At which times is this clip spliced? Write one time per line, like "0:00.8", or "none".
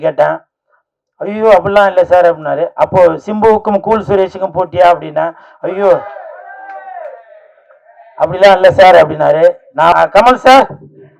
0:09.9